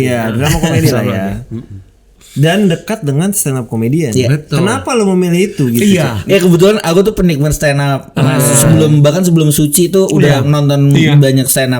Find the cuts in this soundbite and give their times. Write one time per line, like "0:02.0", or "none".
0:06.2

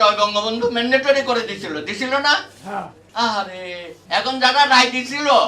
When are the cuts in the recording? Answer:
0:03.0
0:03.9

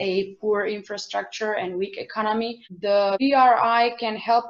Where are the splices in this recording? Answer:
none

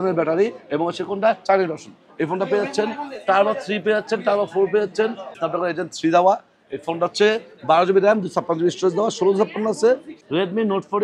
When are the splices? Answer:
0:05.3
0:10.1

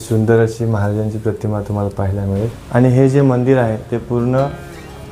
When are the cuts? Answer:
0:02.6

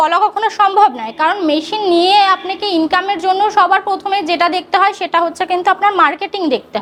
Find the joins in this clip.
none

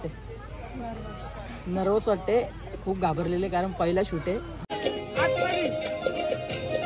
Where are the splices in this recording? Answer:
0:04.6

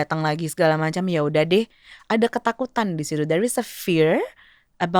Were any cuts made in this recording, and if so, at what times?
none

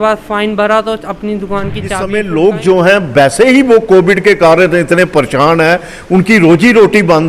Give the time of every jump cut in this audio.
0:02.1

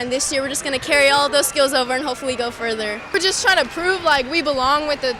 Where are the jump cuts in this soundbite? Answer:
none

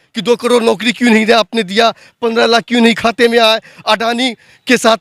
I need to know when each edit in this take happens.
none

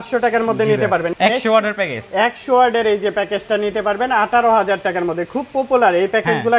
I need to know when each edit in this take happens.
0:01.1

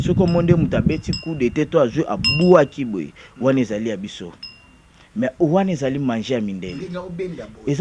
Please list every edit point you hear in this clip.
none

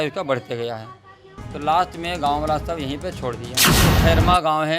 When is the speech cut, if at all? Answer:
0:03.7

